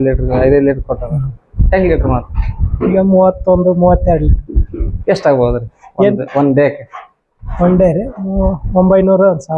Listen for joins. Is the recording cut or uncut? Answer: uncut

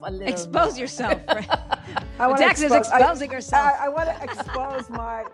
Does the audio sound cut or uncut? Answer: uncut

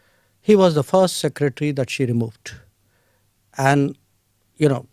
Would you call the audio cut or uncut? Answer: uncut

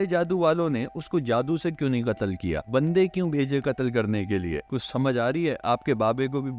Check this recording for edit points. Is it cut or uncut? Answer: uncut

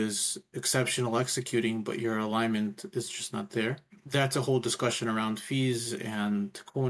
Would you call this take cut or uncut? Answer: uncut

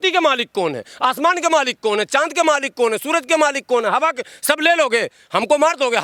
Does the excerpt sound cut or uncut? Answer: uncut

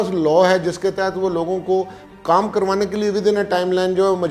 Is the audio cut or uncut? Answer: uncut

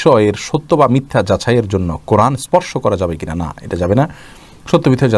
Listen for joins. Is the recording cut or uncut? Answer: uncut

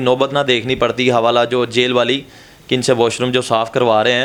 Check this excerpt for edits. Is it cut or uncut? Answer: uncut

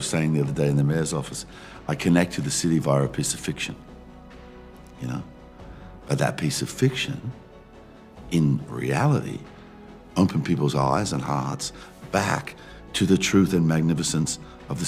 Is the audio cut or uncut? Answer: uncut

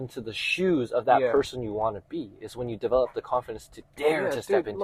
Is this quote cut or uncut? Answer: uncut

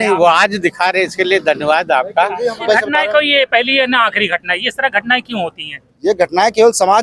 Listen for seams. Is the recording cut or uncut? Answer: cut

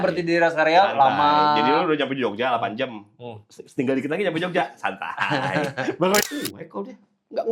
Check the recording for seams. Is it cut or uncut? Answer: cut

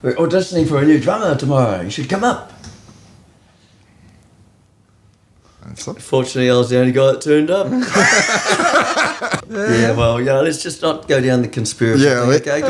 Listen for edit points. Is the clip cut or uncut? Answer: cut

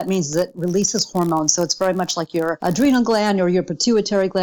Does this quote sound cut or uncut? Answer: cut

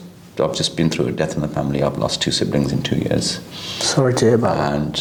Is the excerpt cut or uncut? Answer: uncut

